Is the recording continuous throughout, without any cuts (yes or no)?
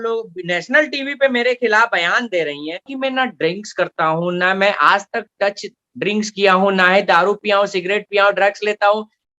no